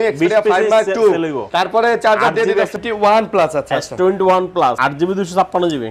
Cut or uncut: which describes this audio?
cut